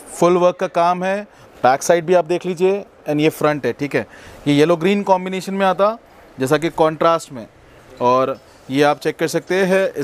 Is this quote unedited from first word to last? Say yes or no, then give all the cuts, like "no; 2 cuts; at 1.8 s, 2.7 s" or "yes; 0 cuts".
yes; 0 cuts